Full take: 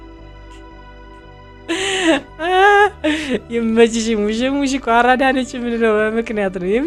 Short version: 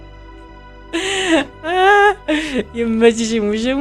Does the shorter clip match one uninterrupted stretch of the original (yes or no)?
no